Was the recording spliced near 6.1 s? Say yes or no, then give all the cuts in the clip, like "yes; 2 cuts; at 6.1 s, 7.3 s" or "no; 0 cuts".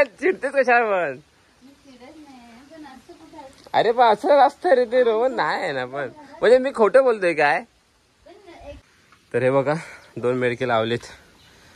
no; 1 cut; at 8.8 s